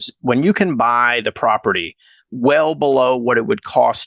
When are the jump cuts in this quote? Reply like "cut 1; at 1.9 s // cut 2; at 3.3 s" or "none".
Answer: none